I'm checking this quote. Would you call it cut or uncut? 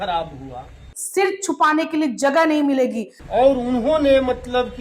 cut